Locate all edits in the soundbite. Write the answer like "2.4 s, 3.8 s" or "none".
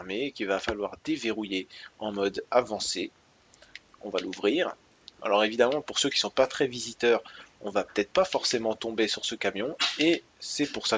7.5 s